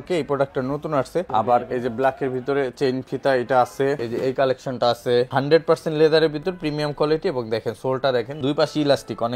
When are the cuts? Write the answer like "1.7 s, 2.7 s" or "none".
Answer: 1.3 s, 4.0 s, 5.3 s, 8.4 s

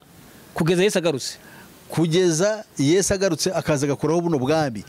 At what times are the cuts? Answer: none

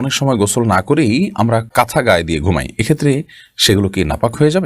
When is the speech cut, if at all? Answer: 1.7 s

